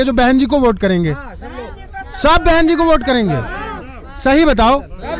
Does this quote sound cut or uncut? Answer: uncut